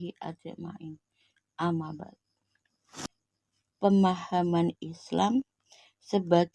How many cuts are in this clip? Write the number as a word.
one